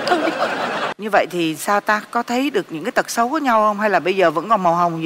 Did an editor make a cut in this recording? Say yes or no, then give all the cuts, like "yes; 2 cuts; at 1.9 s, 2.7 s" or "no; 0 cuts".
yes; 1 cut; at 0.9 s